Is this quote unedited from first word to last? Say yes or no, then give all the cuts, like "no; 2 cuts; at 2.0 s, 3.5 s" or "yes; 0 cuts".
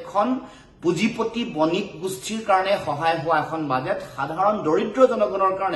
yes; 0 cuts